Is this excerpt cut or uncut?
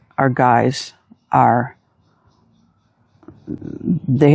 uncut